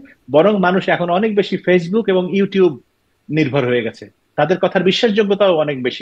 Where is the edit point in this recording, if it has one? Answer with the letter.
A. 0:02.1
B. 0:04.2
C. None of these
B